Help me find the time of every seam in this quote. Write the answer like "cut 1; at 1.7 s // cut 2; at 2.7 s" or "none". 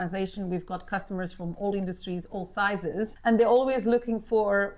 cut 1; at 3.2 s